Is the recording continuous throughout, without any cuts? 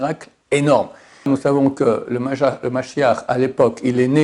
no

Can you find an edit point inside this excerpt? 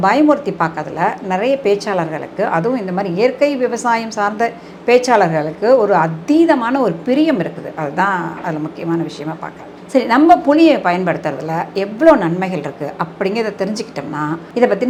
no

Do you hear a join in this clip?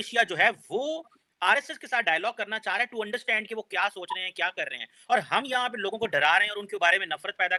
no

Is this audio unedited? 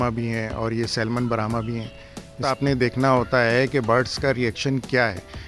no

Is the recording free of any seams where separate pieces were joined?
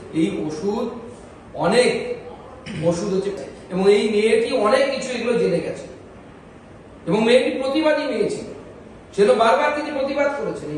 no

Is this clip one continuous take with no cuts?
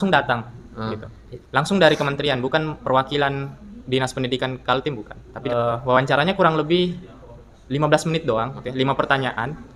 no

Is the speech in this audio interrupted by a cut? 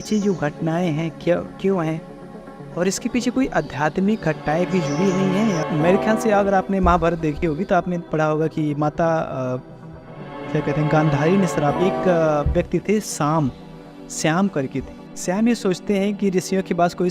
yes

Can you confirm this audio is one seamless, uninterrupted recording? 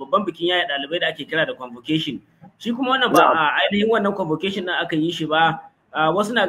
yes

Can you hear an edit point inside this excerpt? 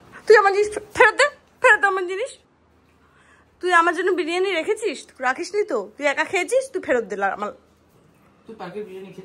no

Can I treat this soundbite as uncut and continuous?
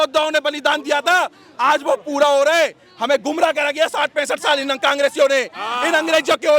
yes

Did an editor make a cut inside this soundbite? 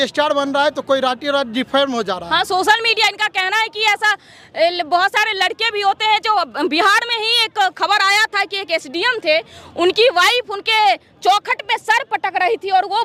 no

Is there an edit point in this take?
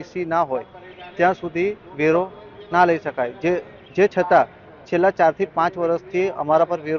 no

